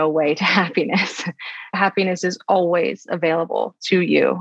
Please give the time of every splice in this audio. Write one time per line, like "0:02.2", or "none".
0:01.7